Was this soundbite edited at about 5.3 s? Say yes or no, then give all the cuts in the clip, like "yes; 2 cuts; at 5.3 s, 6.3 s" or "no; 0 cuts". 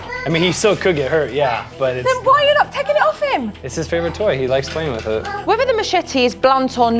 yes; 1 cut; at 5.3 s